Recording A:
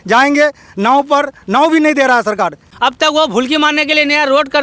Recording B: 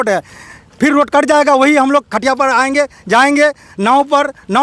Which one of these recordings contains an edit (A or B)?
A